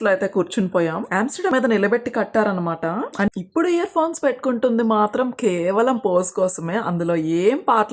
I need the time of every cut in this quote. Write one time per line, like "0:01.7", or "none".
0:01.5
0:03.3